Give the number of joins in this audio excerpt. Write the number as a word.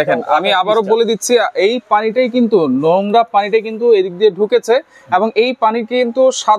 zero